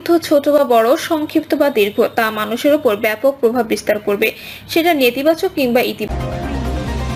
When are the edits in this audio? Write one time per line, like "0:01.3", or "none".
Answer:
0:06.0